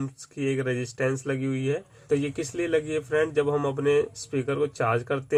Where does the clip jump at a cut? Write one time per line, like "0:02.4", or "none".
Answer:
none